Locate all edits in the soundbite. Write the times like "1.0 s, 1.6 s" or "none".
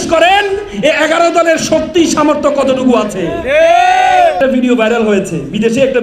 4.4 s